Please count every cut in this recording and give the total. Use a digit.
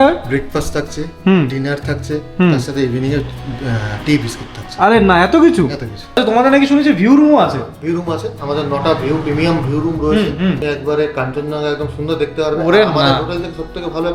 2